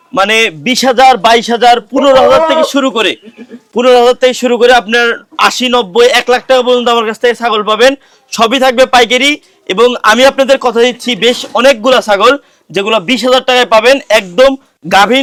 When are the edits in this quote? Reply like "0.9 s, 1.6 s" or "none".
none